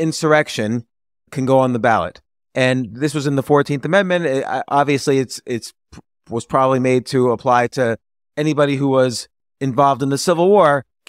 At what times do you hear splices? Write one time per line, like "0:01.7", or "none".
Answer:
0:01.3